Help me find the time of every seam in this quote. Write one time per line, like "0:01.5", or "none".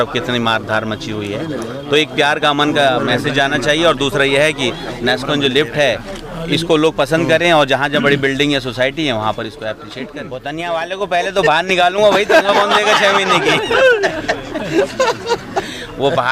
0:10.2